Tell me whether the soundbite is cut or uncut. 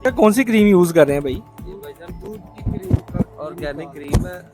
uncut